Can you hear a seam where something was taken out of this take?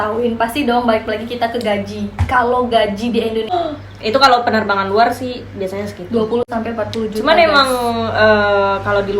yes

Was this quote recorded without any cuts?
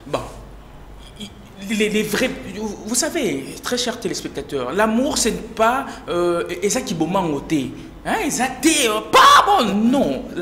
yes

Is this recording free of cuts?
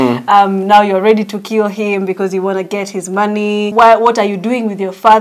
no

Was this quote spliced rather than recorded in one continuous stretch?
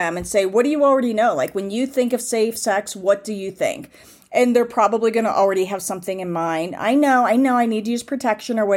no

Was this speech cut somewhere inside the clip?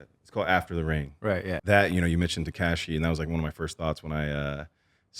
yes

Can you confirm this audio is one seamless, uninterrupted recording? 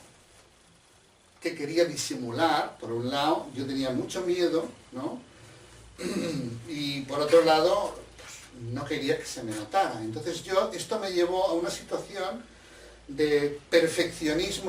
no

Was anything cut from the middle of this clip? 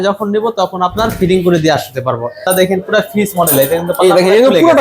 yes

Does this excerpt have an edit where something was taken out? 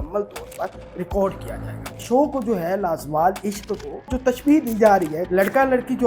yes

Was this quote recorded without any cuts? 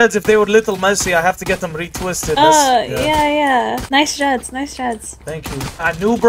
yes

